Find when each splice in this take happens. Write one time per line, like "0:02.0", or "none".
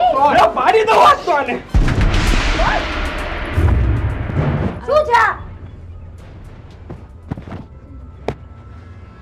0:01.7
0:04.7